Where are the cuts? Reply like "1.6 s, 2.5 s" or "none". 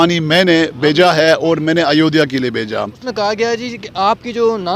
3.0 s

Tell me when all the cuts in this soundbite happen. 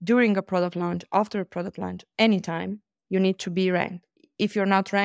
none

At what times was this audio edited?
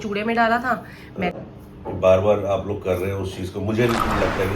1.3 s

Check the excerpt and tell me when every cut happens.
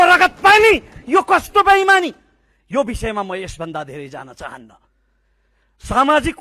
none

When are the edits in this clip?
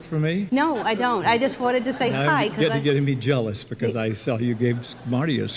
none

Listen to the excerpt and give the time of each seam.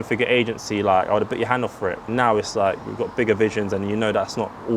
2.0 s

